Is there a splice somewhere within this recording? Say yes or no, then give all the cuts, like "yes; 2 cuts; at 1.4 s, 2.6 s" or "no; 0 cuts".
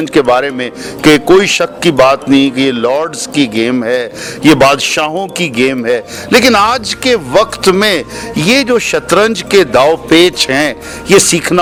no; 0 cuts